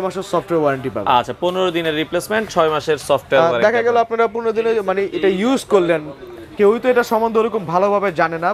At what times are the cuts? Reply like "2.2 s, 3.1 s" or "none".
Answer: none